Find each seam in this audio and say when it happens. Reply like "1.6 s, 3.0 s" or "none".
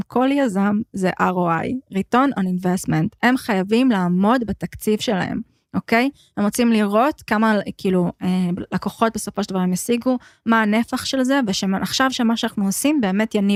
none